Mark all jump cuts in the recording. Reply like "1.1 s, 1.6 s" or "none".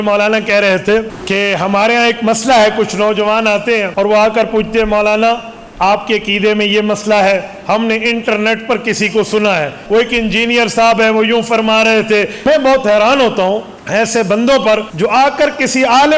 1.1 s, 3.9 s, 9.8 s, 12.3 s, 13.8 s, 14.9 s